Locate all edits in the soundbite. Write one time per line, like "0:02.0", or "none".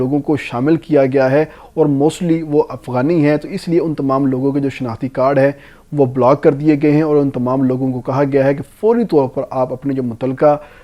none